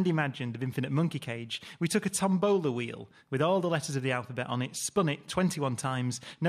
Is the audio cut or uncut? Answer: cut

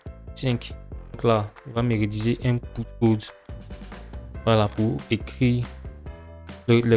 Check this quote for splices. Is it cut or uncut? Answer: cut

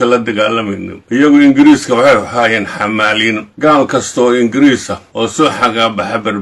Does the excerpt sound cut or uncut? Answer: cut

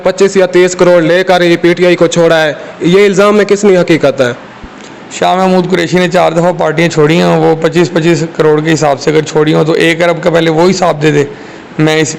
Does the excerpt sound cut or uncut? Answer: uncut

